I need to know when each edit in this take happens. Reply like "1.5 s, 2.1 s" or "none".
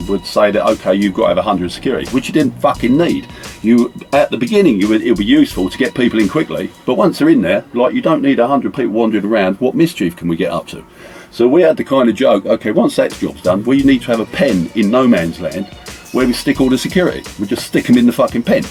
none